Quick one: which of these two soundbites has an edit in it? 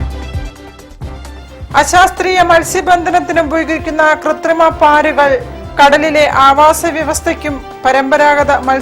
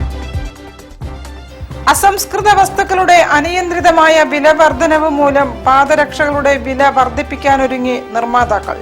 first; 1 cut; at 1.3 s

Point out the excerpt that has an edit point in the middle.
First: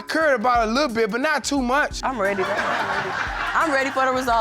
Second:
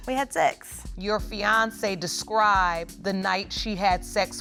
first; 1 cut; at 2.0 s

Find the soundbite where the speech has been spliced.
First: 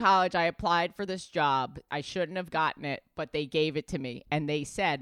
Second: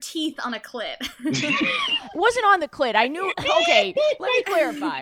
first; 1 cut; at 1.8 s

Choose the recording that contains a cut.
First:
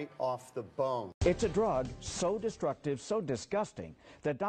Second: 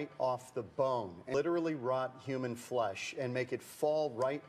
second; 1 cut; at 1.2 s

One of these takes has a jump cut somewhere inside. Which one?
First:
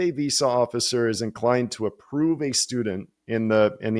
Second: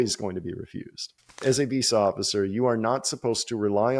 second; 1 cut; at 1.4 s

